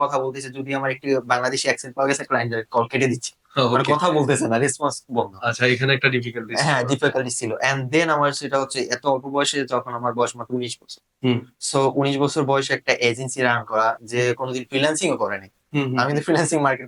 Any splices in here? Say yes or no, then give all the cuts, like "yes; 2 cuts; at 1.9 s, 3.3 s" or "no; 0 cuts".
no; 0 cuts